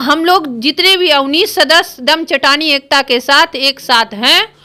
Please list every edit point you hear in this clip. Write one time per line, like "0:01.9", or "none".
none

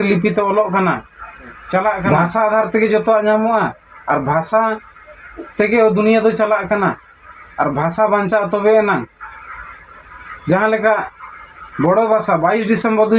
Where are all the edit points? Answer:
0:02.0

